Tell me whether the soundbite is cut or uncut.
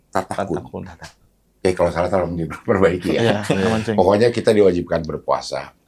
uncut